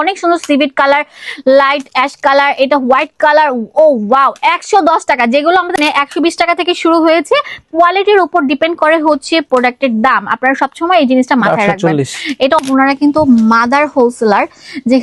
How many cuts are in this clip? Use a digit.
2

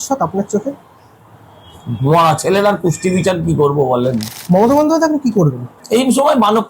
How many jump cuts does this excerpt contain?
2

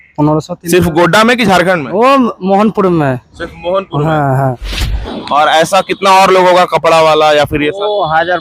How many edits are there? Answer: 1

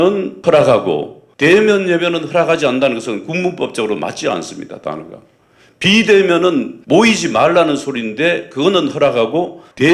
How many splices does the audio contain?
0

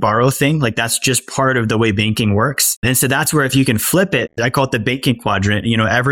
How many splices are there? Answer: 1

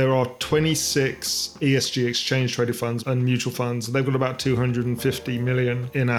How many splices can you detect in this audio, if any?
2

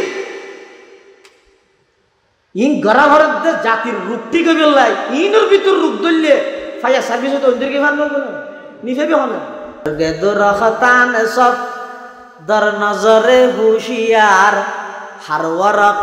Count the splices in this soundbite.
1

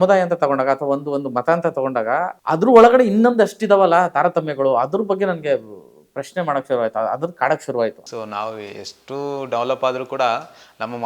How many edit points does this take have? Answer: 2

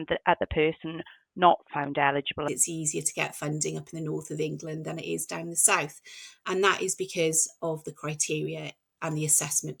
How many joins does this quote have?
1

